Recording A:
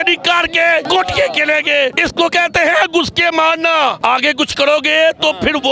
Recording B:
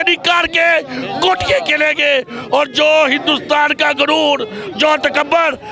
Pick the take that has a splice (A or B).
A